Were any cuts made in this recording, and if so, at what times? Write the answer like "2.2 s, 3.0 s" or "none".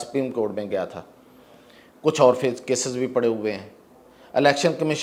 none